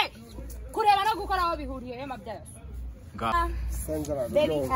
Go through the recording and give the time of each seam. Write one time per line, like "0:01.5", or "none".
0:03.3